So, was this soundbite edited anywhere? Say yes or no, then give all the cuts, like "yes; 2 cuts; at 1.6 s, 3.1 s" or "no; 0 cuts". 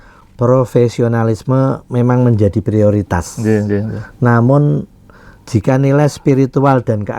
no; 0 cuts